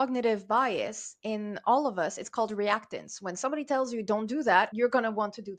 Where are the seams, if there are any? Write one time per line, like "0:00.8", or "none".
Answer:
0:04.7